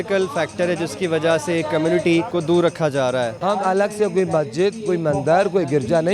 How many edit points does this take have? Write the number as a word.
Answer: two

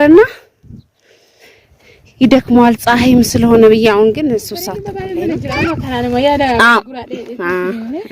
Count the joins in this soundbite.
one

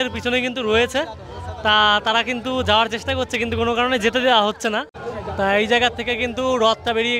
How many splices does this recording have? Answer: one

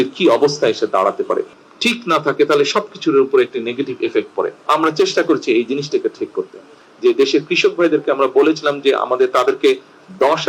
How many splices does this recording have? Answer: two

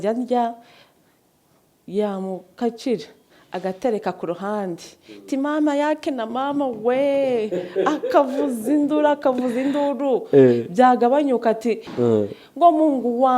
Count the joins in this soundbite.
one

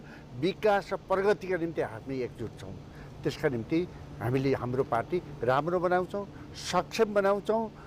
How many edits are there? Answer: zero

